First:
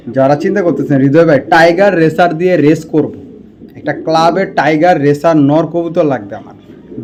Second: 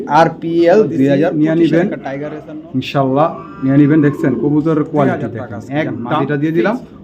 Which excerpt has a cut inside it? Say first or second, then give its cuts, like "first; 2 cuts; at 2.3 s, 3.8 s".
second; 2 cuts; at 1.3 s, 6.1 s